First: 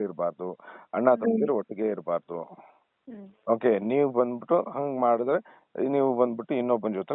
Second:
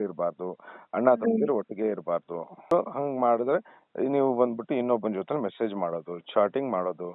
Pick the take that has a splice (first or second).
second